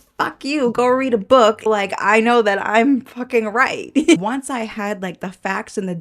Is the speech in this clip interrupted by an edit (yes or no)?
yes